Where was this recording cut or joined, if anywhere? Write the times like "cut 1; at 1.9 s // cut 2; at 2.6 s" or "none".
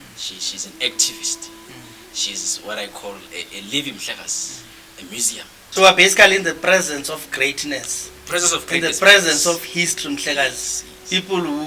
cut 1; at 5.6 s